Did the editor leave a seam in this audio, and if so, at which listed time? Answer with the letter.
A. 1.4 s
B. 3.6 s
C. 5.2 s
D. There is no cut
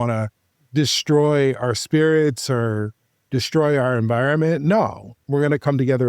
C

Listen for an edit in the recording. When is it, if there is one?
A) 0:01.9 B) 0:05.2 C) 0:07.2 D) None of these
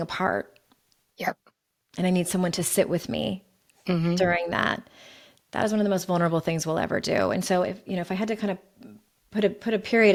D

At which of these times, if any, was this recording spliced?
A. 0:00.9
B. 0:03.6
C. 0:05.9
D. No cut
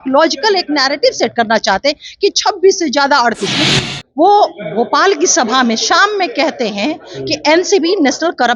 B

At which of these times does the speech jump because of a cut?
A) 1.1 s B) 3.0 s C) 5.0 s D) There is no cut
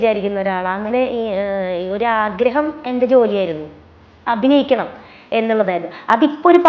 D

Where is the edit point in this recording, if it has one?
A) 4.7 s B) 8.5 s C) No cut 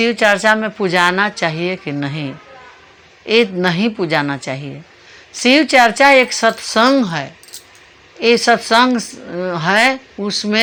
C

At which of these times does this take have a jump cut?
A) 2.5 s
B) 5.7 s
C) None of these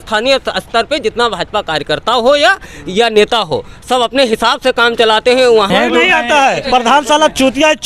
B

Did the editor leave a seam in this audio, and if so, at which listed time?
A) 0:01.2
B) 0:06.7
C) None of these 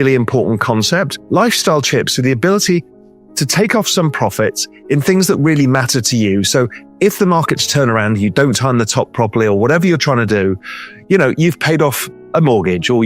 A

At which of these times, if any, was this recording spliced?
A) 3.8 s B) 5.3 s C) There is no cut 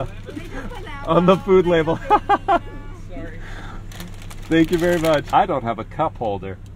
B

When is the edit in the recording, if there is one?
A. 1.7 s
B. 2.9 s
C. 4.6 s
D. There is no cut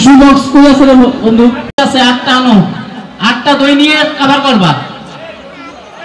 A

